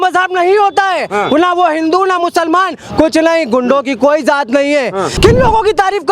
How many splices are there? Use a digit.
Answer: 1